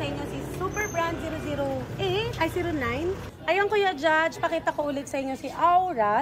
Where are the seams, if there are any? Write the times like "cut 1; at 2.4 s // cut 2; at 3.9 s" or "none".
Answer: cut 1; at 3.3 s